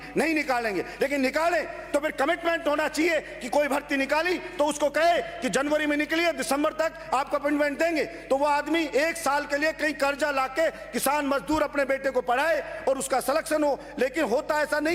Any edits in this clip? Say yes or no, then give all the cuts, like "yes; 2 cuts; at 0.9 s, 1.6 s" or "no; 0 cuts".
no; 0 cuts